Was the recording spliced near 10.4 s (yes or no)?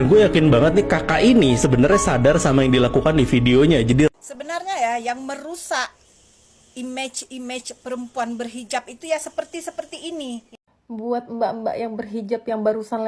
yes